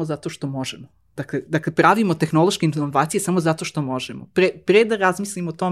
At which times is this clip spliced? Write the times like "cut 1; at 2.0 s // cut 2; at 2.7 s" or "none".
none